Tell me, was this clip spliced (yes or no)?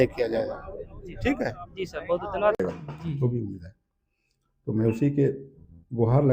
yes